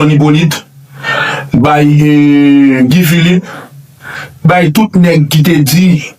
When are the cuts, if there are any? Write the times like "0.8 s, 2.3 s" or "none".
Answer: none

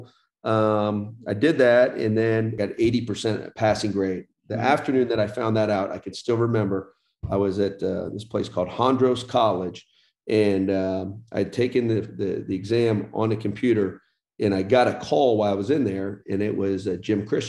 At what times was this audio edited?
2.5 s

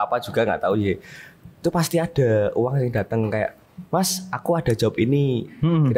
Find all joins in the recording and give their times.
none

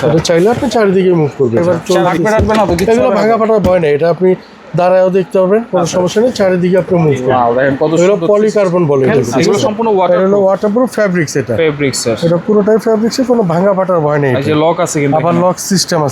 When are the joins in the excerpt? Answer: 1.6 s, 9.1 s

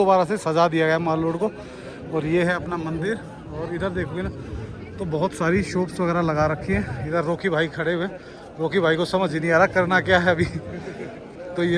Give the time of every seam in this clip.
none

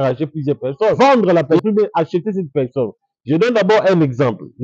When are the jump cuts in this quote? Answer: 1.0 s

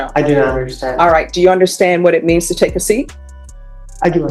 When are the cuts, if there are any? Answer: none

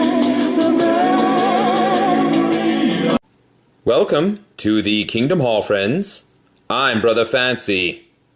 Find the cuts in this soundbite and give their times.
1.9 s

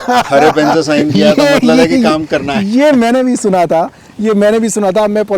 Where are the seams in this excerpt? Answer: none

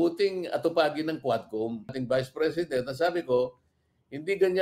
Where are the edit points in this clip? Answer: 2.0 s

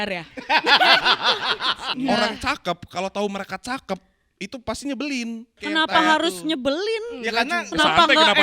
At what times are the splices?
1.8 s, 5.6 s

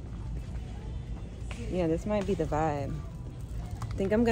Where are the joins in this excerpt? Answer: none

